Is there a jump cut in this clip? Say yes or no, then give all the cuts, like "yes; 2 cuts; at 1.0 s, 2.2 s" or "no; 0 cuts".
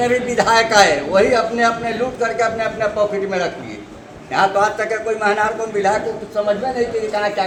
no; 0 cuts